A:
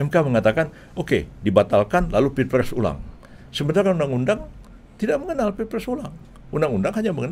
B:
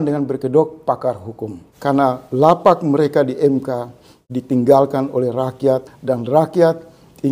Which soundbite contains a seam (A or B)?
B